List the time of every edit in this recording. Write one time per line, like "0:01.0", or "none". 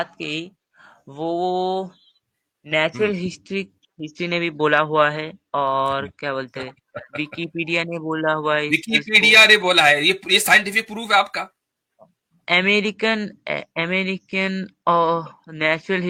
none